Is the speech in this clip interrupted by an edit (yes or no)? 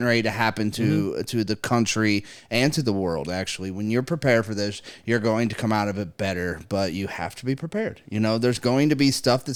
no